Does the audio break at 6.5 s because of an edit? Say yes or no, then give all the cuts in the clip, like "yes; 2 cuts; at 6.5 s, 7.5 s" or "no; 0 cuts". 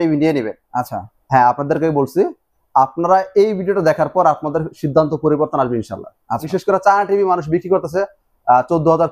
yes; 1 cut; at 6.5 s